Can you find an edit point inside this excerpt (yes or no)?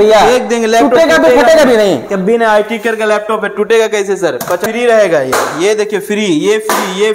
yes